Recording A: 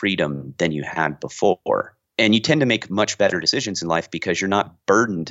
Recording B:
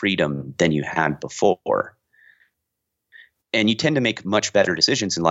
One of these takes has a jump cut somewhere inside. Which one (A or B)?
A